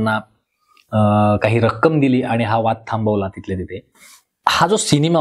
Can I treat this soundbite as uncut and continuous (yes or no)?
yes